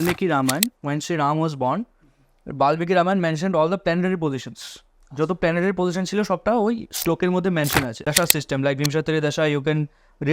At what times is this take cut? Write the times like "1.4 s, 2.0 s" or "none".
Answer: 8.0 s